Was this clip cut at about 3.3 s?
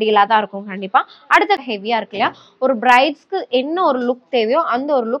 no; 1 cut; at 1.6 s

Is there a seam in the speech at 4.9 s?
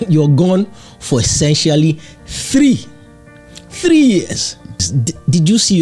yes; 1 cut; at 4.9 s

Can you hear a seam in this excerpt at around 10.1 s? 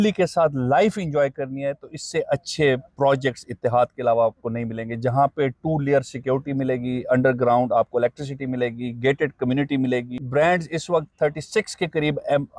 yes; 1 cut; at 10.1 s

